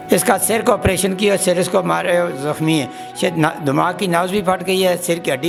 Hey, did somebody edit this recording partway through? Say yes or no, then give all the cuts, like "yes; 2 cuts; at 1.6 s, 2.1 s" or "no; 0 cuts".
no; 0 cuts